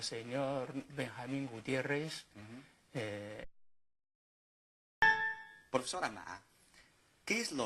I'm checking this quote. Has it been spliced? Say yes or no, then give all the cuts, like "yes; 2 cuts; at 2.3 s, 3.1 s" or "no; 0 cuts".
no; 0 cuts